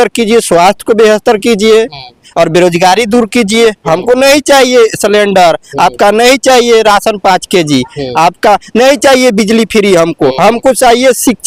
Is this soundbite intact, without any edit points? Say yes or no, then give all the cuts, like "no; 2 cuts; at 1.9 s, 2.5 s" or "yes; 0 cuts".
yes; 0 cuts